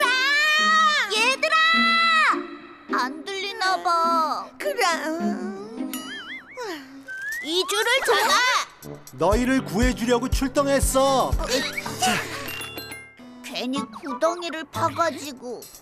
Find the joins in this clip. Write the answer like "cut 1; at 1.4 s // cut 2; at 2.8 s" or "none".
cut 1; at 11.4 s // cut 2; at 13.2 s